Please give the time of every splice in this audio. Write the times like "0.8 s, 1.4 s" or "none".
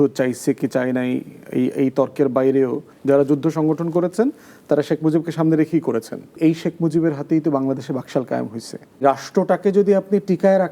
2.9 s, 6.4 s, 9.0 s

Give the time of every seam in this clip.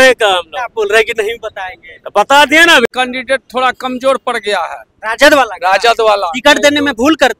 2.9 s

